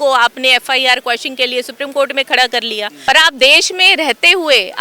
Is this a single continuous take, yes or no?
no